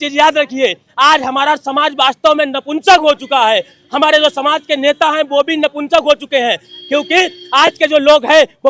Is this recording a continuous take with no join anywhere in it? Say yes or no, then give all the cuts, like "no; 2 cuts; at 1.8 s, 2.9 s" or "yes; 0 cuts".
yes; 0 cuts